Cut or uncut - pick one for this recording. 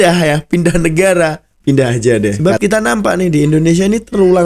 cut